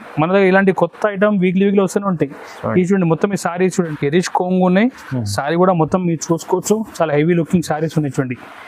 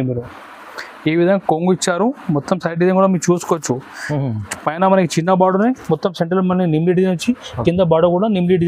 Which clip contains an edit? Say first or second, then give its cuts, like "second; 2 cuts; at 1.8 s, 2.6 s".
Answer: first; 1 cut; at 3.9 s